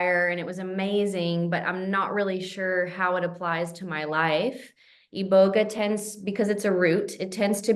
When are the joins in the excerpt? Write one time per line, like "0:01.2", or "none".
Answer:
none